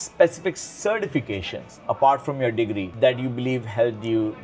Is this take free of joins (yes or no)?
yes